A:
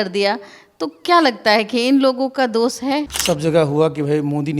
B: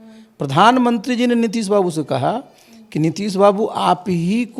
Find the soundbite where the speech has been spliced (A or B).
A